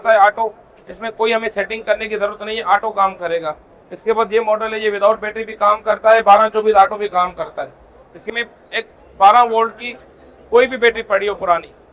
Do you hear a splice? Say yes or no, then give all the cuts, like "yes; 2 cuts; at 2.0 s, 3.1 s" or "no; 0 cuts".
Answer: yes; 1 cut; at 8.3 s